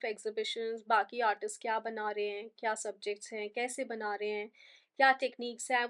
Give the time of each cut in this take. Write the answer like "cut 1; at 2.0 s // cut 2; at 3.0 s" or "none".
none